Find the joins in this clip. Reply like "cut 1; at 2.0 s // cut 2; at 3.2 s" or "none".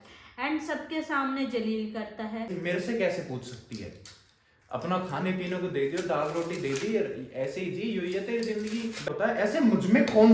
cut 1; at 2.5 s // cut 2; at 9.1 s